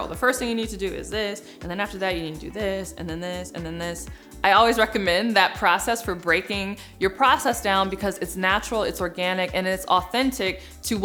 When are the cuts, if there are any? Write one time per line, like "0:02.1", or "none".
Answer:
none